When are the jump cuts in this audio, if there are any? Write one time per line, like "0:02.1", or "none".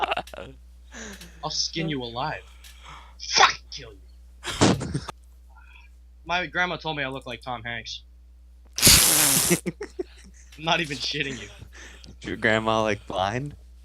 0:05.0